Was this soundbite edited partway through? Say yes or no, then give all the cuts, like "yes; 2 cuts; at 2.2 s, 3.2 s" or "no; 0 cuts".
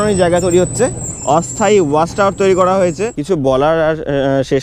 yes; 2 cuts; at 1.1 s, 3.1 s